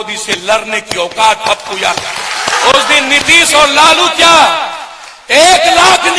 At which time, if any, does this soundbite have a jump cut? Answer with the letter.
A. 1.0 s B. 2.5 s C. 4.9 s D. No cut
B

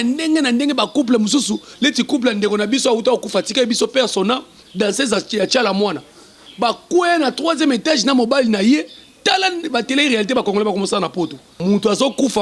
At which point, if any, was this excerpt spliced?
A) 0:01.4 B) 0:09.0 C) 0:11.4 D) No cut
C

